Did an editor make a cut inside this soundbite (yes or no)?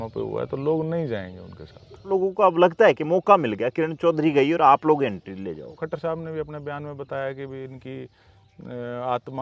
yes